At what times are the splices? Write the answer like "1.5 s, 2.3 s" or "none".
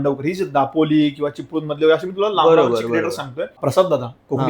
3.6 s